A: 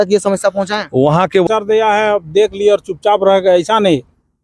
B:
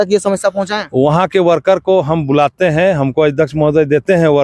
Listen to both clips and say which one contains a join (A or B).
A